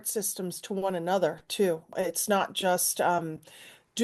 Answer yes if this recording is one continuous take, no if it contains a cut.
no